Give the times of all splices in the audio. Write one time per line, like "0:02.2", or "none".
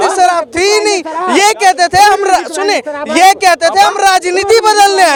none